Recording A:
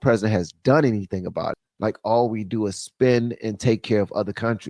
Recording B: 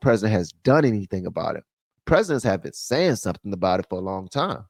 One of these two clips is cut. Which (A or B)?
A